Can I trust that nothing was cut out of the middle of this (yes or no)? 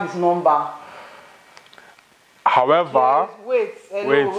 yes